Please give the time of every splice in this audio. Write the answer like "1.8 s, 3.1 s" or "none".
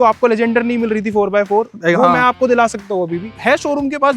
3.3 s